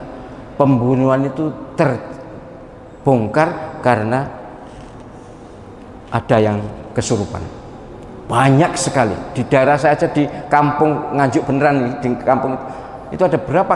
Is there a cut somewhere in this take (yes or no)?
no